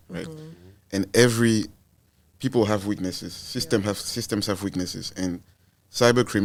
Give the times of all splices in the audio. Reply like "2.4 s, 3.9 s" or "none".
none